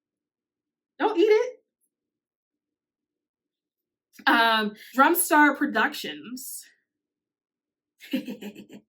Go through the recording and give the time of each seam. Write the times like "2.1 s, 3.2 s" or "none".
4.8 s